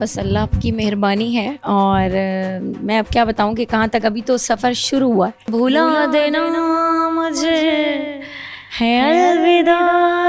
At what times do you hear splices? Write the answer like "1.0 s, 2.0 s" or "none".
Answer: 5.5 s